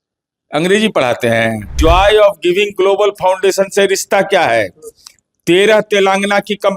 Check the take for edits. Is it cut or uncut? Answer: cut